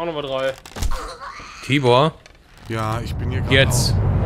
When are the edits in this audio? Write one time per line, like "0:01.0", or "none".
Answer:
none